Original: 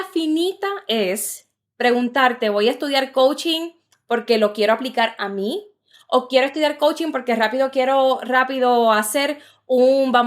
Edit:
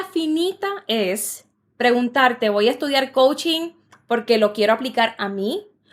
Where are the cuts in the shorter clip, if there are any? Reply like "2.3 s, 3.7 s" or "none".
none